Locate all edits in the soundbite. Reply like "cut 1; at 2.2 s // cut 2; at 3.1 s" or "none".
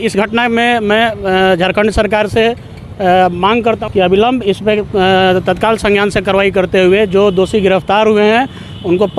cut 1; at 3.8 s